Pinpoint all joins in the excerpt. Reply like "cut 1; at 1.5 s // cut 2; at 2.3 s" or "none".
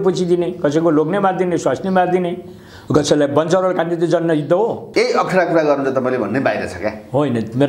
cut 1; at 4.8 s

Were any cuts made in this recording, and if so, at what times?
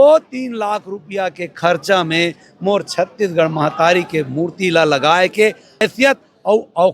cut 1; at 5.8 s

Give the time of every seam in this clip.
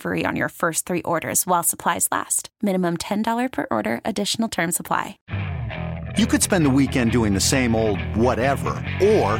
cut 1; at 5.2 s

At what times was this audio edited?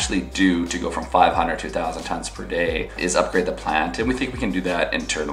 cut 1; at 3.0 s

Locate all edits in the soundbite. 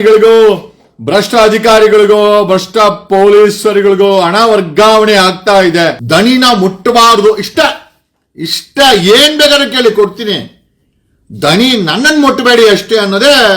cut 1; at 6.0 s

